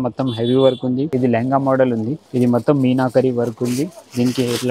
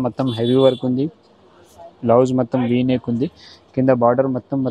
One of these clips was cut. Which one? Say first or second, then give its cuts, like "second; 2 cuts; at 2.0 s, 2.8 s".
first; 2 cuts; at 1.1 s, 2.2 s